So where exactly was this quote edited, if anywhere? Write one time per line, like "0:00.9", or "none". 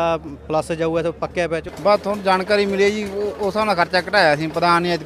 0:01.7